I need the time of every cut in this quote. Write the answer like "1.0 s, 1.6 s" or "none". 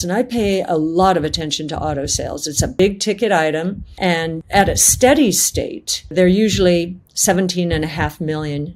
2.8 s, 4.3 s, 6.1 s

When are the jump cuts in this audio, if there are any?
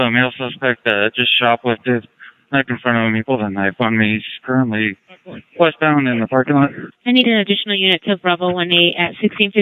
1.4 s, 4.3 s

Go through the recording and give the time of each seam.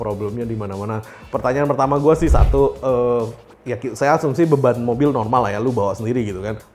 none

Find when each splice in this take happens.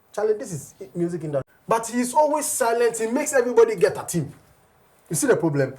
1.5 s

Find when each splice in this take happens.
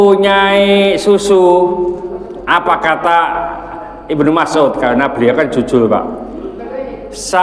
none

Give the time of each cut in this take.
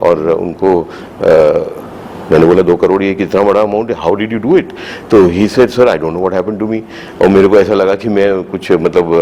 none

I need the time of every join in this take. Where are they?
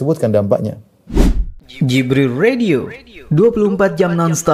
0.9 s

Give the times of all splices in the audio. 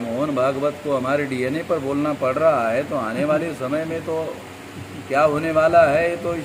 none

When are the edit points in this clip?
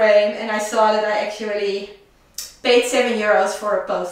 none

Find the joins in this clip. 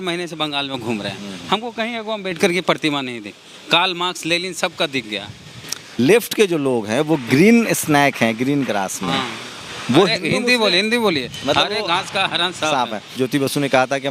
6.0 s, 13.1 s

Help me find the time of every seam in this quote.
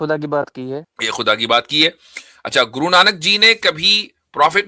1.0 s

